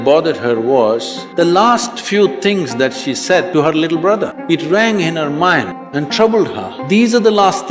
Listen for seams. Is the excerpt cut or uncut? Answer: cut